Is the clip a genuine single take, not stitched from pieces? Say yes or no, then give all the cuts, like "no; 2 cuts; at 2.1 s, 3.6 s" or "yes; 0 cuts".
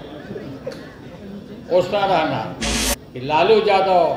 no; 1 cut; at 2.6 s